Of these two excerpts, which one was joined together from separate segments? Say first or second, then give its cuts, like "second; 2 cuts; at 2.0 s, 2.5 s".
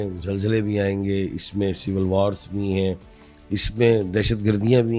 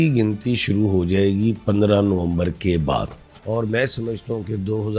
second; 1 cut; at 3.3 s